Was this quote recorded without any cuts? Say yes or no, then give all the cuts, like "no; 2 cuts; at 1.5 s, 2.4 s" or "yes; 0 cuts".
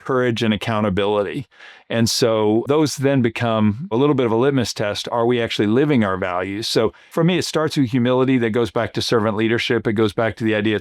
no; 3 cuts; at 2.7 s, 3.9 s, 7.0 s